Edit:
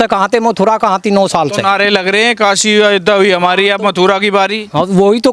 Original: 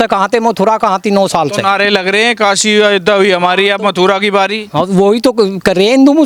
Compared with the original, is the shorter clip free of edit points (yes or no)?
yes